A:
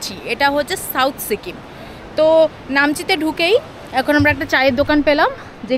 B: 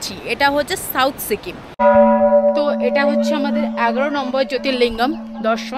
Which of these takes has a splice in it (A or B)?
B